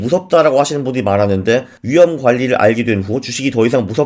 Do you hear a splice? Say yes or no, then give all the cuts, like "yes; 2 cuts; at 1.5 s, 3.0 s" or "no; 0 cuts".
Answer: yes; 1 cut; at 1.8 s